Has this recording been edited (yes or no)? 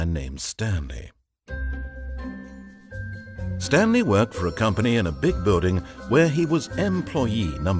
yes